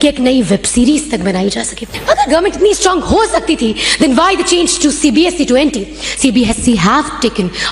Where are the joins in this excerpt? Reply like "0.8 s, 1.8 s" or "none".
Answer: 1.9 s